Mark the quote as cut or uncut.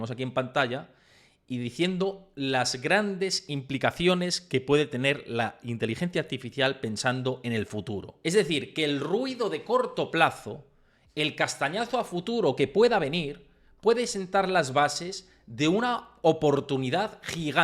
cut